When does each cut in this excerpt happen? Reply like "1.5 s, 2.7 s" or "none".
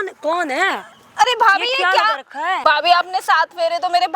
2.6 s